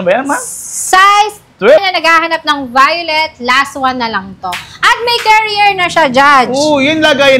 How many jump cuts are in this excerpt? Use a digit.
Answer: 1